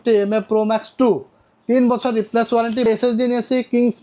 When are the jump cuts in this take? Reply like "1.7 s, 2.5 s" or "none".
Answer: 2.9 s